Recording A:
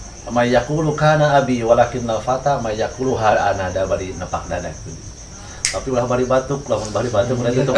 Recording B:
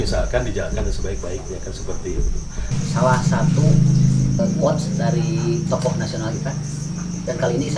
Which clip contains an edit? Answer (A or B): B